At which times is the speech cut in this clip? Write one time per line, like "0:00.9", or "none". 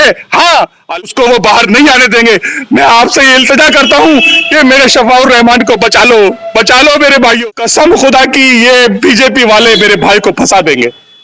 0:01.0
0:07.4

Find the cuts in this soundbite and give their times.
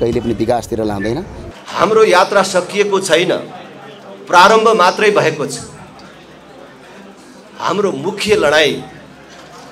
0:01.4

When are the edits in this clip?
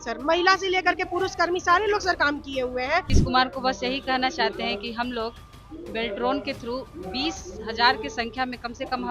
0:03.1

